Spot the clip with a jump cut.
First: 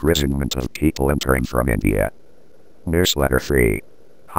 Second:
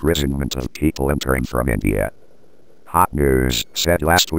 first; 1 cut; at 2.8 s

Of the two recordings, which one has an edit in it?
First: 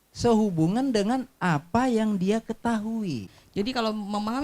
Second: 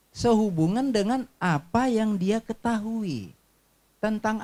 first; 1 cut; at 3.3 s

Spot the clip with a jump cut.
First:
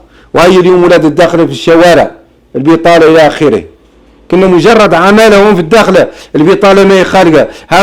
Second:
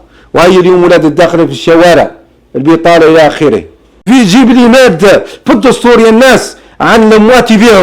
second; 1 cut; at 4.0 s

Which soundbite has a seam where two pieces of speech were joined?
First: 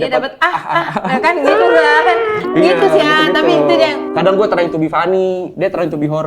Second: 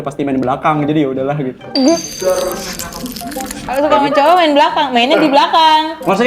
first; 1 cut; at 4.1 s

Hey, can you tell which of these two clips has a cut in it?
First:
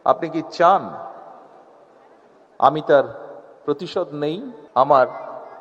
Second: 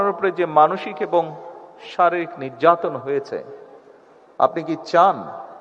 first; 1 cut; at 4.6 s

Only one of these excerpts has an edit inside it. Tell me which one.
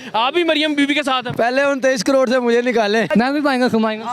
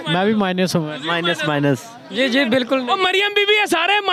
first; 2 cuts; at 1.3 s, 3.1 s

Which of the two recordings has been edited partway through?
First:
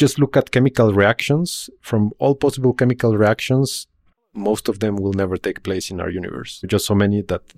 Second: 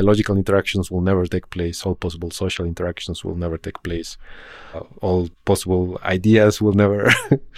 second; 1 cut; at 5.4 s

